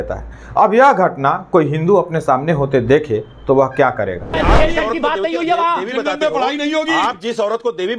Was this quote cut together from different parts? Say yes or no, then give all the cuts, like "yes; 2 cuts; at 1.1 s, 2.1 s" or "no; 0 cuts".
yes; 1 cut; at 4.3 s